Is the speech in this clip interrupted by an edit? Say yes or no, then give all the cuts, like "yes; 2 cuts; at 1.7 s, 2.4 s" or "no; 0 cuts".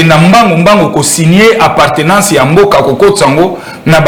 no; 0 cuts